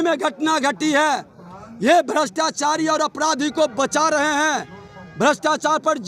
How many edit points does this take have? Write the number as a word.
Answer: zero